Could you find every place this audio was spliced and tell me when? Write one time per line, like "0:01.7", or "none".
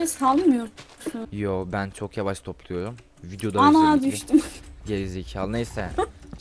none